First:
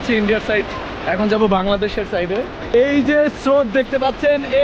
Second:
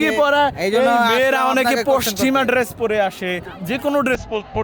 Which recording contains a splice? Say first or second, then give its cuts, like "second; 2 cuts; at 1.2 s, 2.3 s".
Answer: second; 1 cut; at 3.5 s